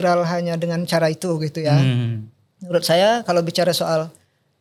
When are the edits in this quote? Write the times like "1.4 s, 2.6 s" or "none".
none

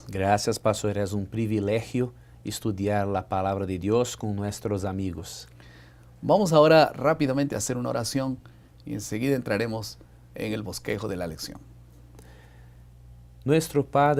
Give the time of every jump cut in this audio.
none

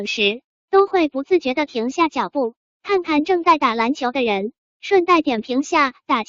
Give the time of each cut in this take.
3.8 s

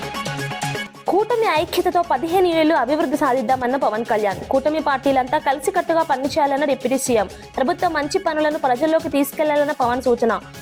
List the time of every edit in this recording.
0.9 s

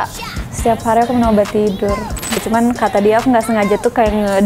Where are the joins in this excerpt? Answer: 2.4 s

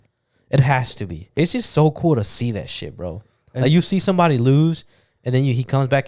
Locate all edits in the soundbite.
1.3 s

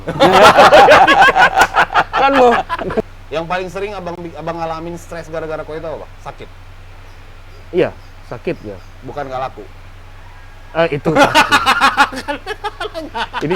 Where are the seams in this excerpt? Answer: 3.2 s

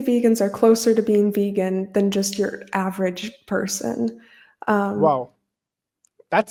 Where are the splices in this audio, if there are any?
none

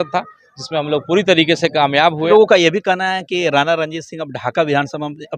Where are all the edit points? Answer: 2.3 s

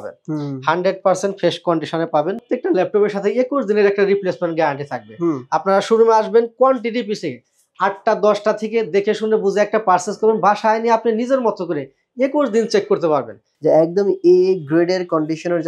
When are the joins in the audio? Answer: 2.4 s, 13.4 s

